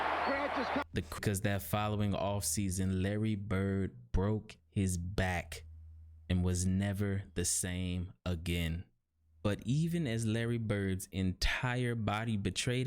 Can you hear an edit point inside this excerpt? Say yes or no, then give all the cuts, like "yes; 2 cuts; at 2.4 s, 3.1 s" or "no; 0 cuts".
yes; 1 cut; at 1.2 s